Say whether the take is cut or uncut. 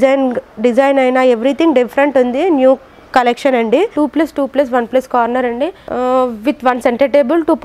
cut